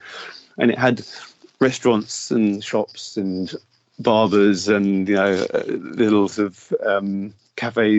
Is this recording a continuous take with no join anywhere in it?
yes; 0 cuts

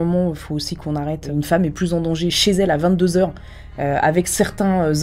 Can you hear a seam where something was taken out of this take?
yes; 1 cut; at 1.2 s

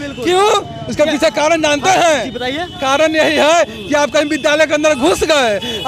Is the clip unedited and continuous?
yes; 0 cuts

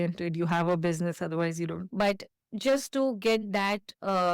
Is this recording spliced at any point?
yes; 1 cut; at 1.8 s

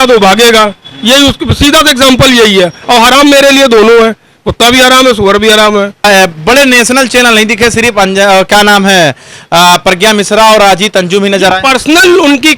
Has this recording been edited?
yes; 1 cut; at 6.0 s

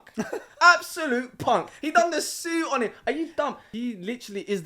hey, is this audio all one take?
no; 1 cut; at 3.7 s

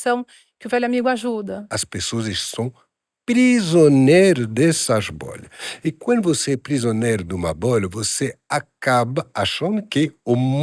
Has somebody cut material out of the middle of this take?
yes; 1 cut; at 1.7 s

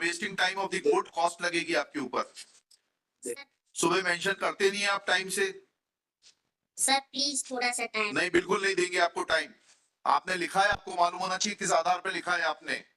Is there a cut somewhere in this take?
no; 0 cuts

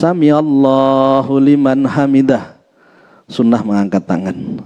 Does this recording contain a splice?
no; 0 cuts

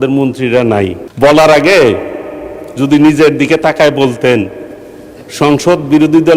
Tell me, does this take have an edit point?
yes; 1 cut; at 1.0 s

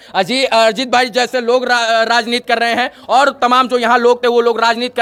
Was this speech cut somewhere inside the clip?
no; 0 cuts

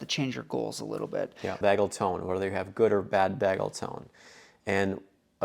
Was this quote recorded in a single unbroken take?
no; 1 cut; at 1.6 s

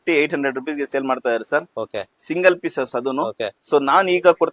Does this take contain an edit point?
no; 0 cuts

